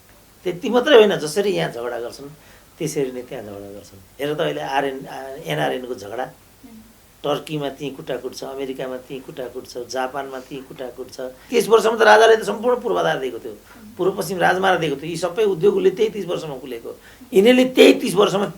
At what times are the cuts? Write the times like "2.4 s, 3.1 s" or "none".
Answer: 11.4 s